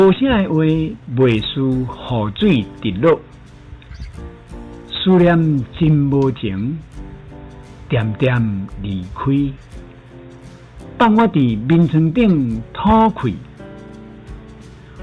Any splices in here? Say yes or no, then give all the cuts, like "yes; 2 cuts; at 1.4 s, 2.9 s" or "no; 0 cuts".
no; 0 cuts